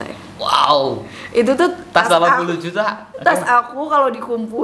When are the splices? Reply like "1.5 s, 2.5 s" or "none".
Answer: 3.1 s